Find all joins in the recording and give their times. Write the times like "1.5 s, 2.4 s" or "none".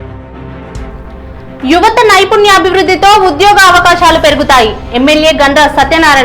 0.9 s